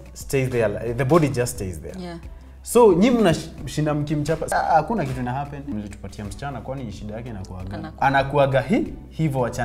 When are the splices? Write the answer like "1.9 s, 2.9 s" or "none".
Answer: 4.4 s, 5.6 s, 7.9 s